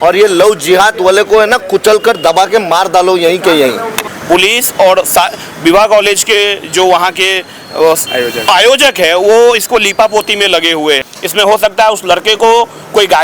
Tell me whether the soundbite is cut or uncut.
cut